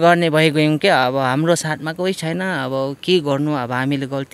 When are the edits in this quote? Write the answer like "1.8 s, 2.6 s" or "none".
none